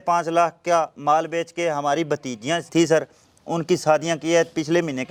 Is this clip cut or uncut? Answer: uncut